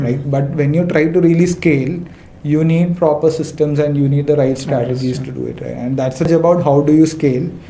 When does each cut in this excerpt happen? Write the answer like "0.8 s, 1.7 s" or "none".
6.3 s